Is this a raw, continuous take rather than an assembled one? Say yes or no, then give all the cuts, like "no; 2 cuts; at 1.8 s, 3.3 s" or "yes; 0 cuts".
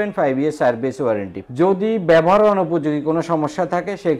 no; 1 cut; at 1.4 s